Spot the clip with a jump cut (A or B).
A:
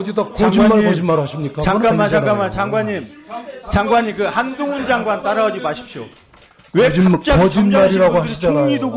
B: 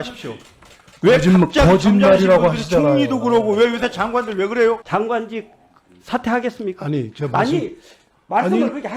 B